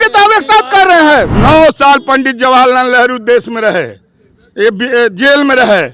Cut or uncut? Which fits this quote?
cut